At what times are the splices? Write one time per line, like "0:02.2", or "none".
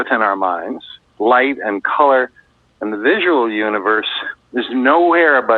0:01.0